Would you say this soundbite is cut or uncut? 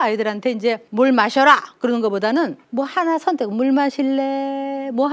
cut